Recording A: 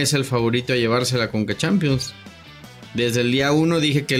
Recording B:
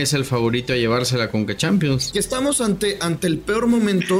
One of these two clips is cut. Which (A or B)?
B